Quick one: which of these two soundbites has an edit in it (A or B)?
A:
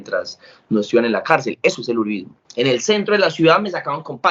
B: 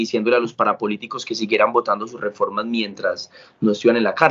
A